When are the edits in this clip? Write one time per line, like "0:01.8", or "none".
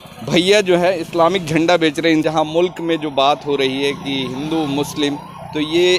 0:02.2

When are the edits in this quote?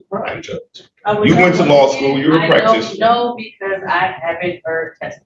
none

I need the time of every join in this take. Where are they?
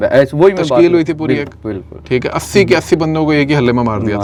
none

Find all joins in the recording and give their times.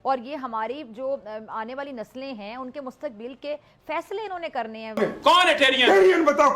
0:04.8

